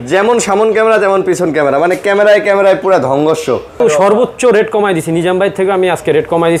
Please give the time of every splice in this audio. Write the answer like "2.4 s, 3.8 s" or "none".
3.8 s